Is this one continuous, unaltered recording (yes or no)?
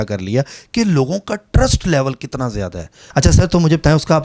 no